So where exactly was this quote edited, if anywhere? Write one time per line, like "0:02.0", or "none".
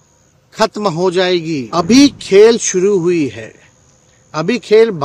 0:01.6